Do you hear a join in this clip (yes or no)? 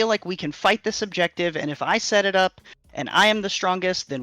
no